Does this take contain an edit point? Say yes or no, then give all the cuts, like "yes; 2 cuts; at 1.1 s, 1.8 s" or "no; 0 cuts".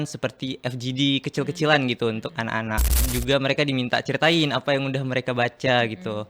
yes; 1 cut; at 3.1 s